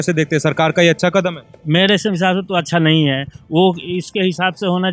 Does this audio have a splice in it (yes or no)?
no